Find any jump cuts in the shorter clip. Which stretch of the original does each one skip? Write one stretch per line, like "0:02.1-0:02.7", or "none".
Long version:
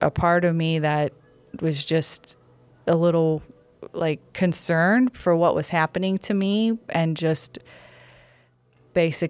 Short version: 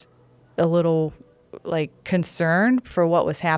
none